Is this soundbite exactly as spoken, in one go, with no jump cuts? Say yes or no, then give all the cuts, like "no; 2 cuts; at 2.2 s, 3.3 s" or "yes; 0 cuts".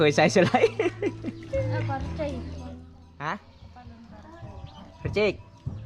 yes; 0 cuts